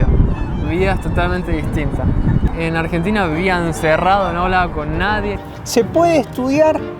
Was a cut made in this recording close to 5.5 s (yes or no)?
yes